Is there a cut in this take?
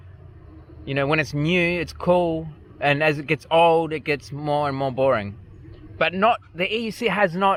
no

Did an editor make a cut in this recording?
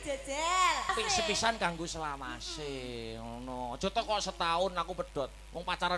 yes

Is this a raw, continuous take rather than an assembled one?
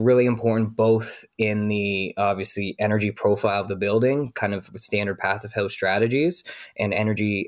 yes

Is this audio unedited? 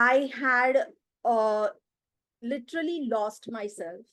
yes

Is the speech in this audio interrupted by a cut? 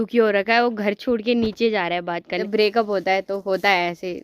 yes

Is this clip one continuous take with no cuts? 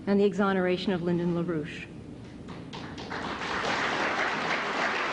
yes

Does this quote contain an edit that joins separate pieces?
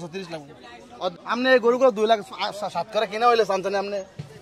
yes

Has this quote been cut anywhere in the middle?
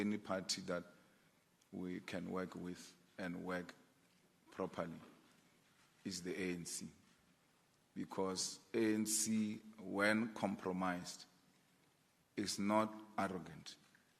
no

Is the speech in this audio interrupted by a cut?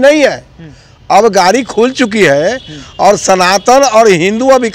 no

